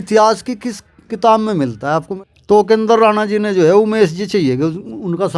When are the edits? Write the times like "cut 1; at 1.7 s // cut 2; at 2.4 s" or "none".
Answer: cut 1; at 2.2 s